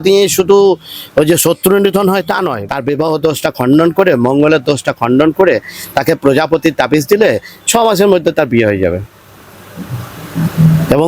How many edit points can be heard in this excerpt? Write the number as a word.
one